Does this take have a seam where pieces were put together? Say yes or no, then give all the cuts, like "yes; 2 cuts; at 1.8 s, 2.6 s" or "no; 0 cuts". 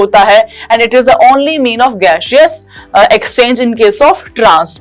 no; 0 cuts